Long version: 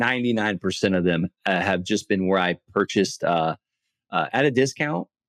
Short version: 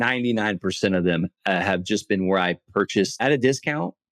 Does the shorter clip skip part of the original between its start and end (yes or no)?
yes